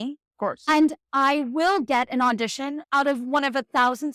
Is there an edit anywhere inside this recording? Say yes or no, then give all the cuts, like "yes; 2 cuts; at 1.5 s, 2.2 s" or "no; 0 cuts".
yes; 1 cut; at 2.8 s